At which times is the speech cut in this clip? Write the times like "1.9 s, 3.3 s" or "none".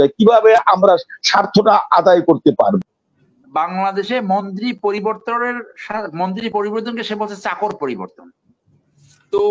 2.8 s